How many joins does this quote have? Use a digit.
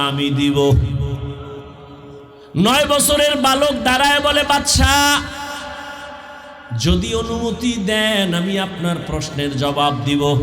1